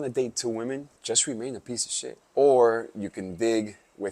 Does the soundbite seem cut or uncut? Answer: cut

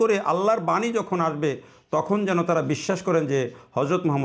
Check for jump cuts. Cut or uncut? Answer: uncut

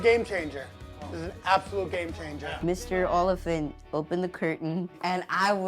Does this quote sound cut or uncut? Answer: cut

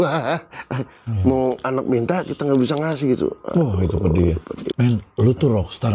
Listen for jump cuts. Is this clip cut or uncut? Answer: cut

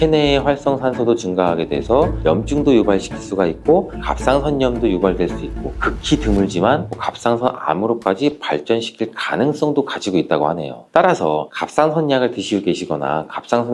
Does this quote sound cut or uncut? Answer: uncut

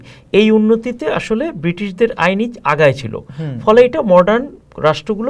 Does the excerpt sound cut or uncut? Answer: uncut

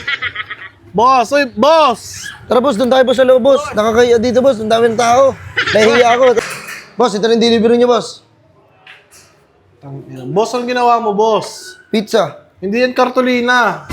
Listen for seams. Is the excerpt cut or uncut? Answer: cut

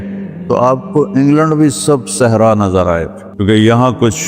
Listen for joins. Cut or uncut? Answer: cut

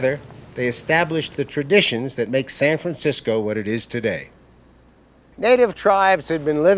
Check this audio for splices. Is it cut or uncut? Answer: cut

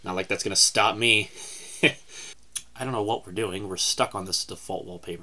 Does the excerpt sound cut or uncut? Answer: cut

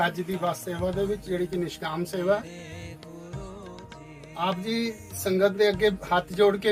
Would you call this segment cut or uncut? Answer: uncut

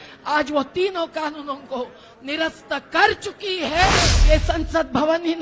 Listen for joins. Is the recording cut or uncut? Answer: cut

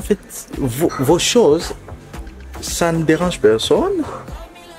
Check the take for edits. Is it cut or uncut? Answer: uncut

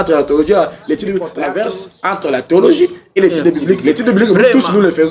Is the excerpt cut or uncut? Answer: cut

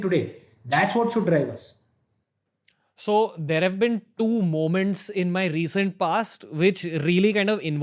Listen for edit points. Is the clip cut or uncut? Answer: uncut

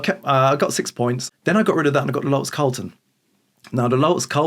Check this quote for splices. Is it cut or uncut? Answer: cut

